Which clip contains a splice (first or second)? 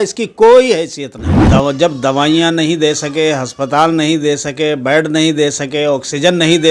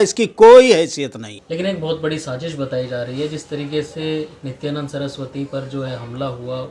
first